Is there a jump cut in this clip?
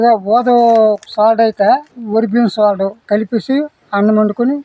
yes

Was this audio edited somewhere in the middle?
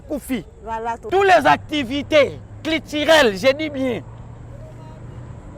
yes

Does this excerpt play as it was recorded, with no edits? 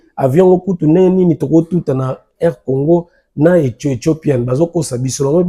yes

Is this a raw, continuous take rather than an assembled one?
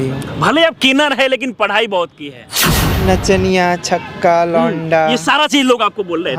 no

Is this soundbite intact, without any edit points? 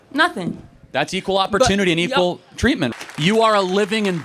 no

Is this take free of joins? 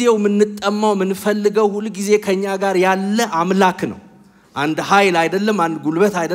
yes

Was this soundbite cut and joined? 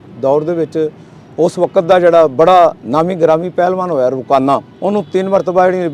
yes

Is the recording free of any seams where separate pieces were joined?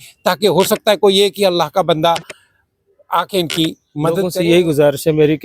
no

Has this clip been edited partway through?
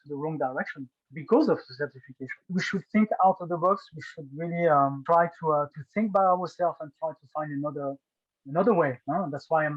no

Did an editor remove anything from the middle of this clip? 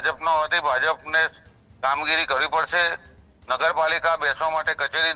no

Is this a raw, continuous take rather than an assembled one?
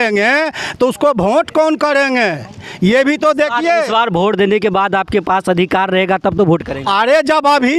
yes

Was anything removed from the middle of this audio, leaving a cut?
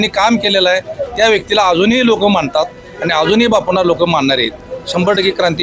no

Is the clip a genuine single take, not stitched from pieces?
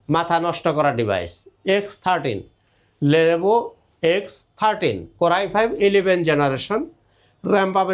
yes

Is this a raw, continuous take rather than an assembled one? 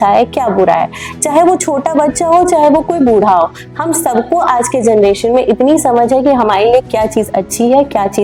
yes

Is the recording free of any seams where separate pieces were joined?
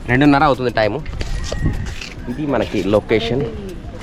yes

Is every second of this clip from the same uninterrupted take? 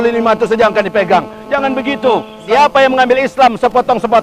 no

